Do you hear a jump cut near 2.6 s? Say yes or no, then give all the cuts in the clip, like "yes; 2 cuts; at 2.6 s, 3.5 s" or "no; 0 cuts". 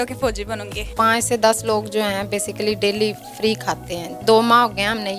no; 2 cuts; at 0.9 s, 4.2 s